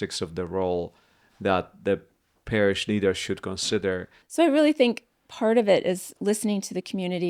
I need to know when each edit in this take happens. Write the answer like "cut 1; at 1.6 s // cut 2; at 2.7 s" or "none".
cut 1; at 4.1 s